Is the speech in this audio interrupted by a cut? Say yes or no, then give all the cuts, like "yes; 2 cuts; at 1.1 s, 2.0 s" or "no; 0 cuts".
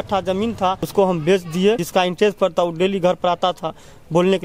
yes; 2 cuts; at 0.8 s, 1.8 s